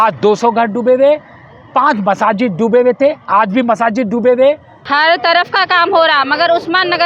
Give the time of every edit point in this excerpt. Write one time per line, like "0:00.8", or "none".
0:04.7

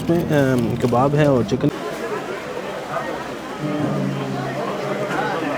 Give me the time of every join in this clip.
0:01.6

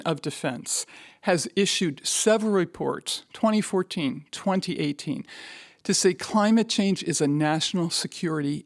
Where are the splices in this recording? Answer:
none

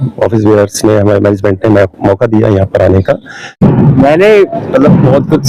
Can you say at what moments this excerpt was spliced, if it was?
0:03.6

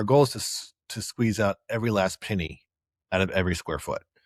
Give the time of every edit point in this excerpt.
none

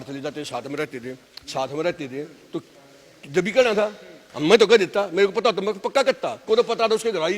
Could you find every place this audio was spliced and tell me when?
0:06.3

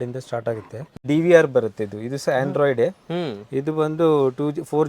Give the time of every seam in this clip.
0:01.1

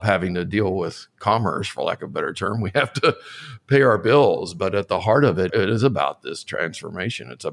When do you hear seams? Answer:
0:05.5

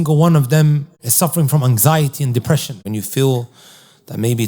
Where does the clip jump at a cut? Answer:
0:01.0
0:02.8

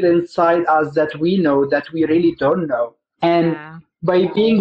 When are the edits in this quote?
none

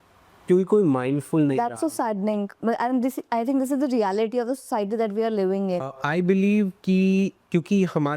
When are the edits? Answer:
0:05.9

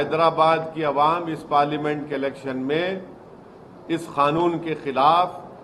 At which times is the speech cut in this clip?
none

